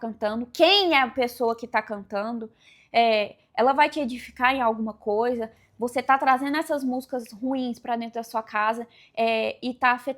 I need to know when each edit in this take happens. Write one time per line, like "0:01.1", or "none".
none